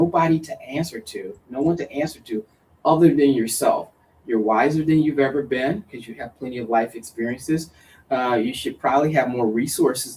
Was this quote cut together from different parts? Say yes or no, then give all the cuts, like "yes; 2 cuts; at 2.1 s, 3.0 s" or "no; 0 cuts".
no; 0 cuts